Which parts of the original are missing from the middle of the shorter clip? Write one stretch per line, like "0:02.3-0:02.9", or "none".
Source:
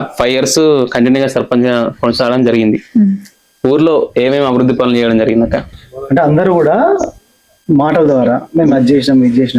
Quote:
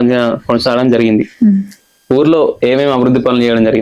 none